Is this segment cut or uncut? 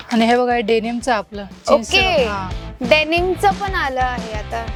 uncut